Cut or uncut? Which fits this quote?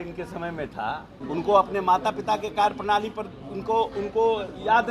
cut